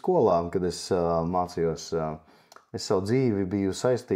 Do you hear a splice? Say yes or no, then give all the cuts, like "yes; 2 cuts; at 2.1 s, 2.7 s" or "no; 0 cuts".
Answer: no; 0 cuts